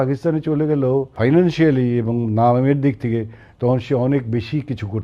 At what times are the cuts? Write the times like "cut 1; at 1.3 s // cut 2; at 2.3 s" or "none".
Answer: cut 1; at 1.1 s